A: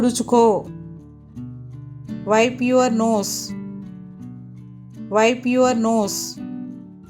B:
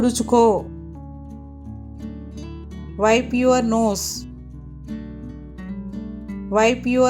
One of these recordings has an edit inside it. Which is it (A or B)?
B